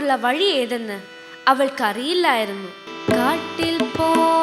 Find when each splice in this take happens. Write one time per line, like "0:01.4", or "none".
0:02.9